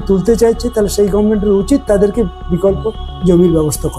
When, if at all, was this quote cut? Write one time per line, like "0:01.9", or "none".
none